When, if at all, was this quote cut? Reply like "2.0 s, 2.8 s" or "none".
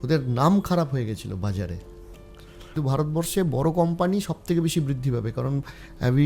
2.8 s